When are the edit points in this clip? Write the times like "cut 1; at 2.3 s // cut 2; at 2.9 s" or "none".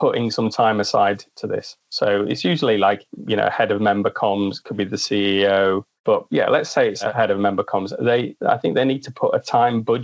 none